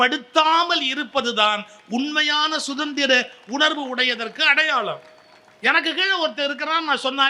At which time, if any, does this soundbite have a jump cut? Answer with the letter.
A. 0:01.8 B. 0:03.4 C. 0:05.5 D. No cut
D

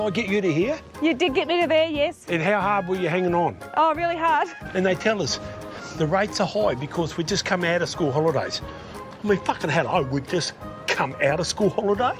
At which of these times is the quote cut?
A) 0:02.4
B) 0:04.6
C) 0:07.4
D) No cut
B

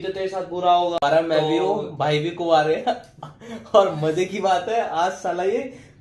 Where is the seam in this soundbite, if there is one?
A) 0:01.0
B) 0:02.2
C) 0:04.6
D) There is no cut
A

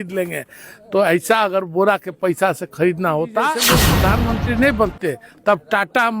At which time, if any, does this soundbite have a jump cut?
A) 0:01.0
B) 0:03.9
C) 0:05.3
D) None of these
B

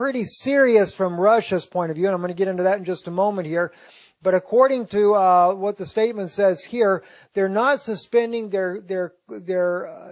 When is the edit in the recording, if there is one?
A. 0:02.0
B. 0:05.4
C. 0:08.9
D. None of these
B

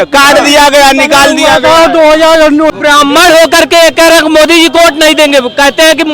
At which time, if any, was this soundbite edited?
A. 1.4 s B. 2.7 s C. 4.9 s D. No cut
B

